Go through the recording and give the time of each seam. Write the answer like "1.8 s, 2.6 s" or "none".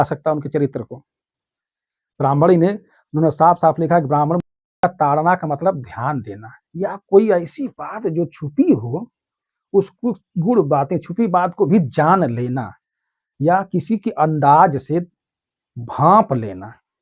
4.6 s